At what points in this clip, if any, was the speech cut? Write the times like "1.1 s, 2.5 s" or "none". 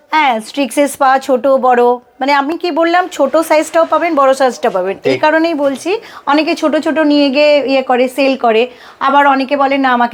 none